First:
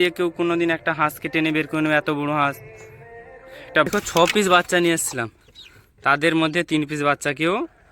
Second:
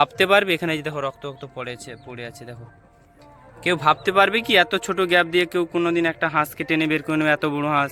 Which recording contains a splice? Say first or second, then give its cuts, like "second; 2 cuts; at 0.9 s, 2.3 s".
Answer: first; 1 cut; at 3.9 s